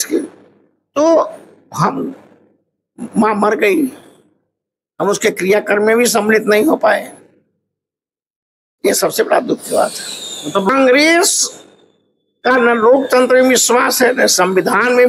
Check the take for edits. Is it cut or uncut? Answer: cut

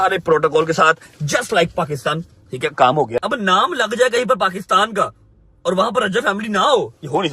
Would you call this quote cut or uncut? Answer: cut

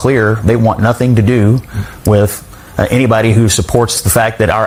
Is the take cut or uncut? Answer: uncut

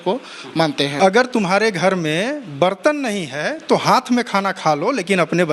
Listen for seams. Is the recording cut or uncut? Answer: cut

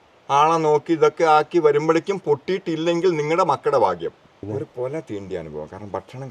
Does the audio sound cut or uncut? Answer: cut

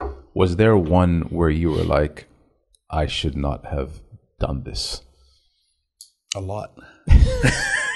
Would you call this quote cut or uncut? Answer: uncut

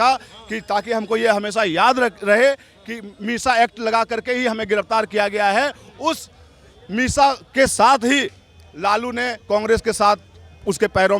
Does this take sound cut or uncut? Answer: uncut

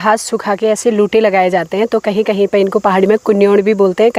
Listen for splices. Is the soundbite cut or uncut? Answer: uncut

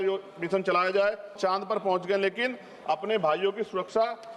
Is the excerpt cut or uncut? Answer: cut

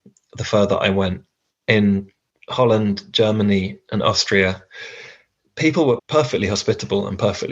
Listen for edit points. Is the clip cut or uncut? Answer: cut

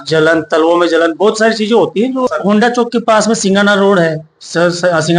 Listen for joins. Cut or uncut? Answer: cut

